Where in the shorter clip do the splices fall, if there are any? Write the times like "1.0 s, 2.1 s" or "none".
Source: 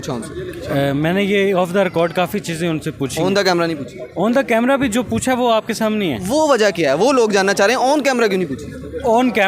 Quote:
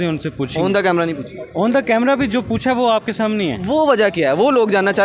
none